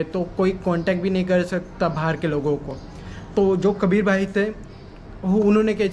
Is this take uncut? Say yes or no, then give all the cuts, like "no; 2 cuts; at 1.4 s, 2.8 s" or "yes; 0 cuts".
yes; 0 cuts